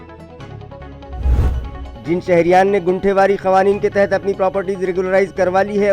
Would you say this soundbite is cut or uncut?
cut